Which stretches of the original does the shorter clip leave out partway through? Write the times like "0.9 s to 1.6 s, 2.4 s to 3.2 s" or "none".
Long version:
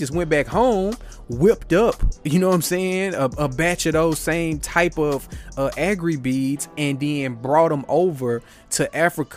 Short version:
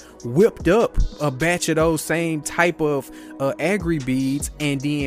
2.2 s to 3.3 s